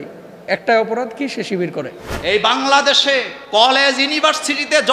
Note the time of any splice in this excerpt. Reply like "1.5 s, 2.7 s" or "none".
2.0 s, 3.4 s